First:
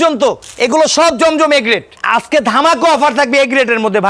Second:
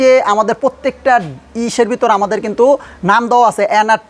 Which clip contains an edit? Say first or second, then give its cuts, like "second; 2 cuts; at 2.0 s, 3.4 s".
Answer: first; 1 cut; at 2.0 s